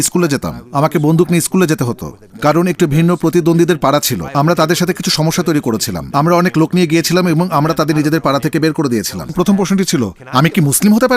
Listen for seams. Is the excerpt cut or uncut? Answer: cut